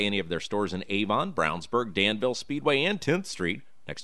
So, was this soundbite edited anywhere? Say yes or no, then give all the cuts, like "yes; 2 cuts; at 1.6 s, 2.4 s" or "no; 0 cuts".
no; 0 cuts